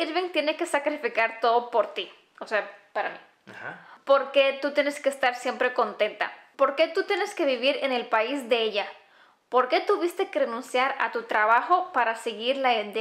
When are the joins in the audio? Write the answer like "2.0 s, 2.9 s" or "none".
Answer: 3.9 s, 6.4 s